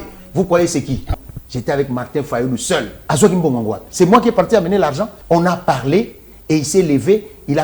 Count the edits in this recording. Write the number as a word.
three